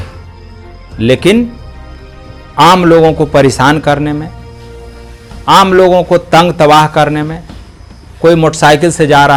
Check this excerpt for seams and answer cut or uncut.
uncut